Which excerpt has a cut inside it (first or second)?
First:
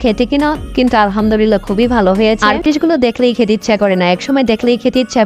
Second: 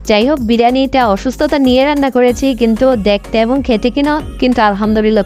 first